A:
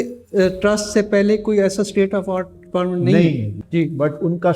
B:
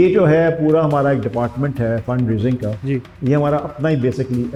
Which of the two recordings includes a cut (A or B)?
A